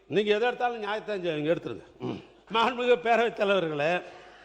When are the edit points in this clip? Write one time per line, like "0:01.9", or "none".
0:02.3